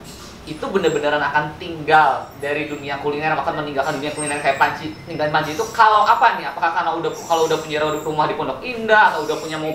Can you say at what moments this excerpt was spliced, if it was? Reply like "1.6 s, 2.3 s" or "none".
none